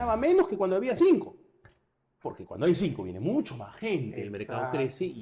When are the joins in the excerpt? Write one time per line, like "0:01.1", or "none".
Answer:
none